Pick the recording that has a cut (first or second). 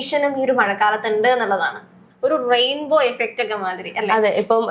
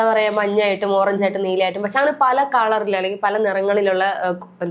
first